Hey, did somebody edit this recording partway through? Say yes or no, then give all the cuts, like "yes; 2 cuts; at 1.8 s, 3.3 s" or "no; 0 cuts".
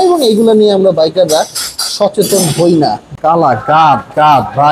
yes; 1 cut; at 3.0 s